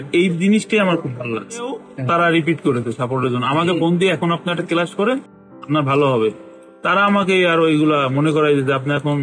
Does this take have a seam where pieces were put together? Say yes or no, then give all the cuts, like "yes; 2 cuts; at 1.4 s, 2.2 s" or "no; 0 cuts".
yes; 1 cut; at 1.9 s